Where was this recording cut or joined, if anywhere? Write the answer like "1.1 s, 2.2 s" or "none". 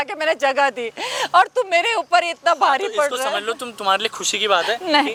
none